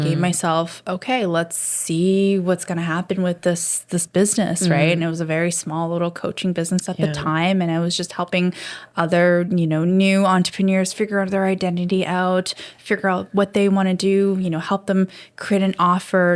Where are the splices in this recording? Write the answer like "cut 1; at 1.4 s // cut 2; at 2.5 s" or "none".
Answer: cut 1; at 1.6 s